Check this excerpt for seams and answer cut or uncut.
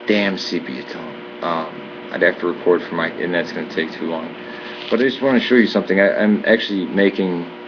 uncut